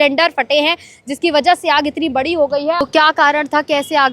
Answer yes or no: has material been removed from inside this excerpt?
yes